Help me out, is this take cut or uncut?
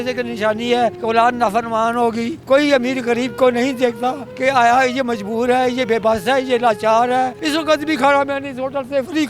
cut